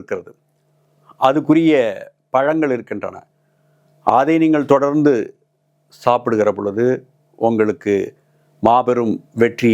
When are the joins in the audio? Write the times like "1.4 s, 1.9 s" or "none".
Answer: none